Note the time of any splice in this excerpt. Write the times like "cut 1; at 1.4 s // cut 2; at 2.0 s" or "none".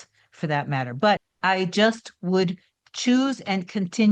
cut 1; at 1.3 s